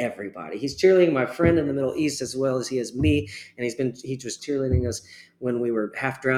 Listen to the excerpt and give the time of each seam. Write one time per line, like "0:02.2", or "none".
0:04.3